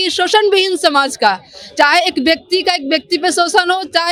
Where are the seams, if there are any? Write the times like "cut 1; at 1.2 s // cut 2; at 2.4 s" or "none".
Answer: none